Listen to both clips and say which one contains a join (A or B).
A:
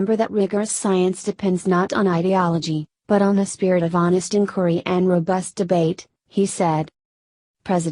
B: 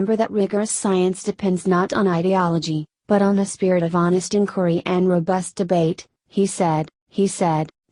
A